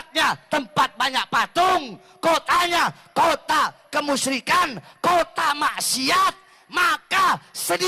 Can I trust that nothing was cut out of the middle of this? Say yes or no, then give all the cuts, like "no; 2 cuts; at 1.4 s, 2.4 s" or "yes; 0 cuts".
yes; 0 cuts